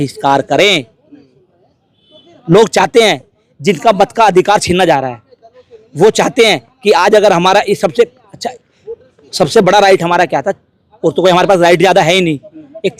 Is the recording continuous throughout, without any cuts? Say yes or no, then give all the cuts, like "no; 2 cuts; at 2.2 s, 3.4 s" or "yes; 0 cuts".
yes; 0 cuts